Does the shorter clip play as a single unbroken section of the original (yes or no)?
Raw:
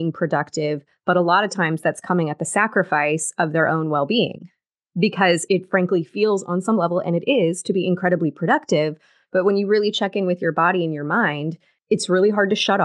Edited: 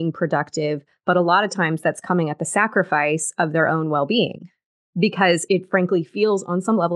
yes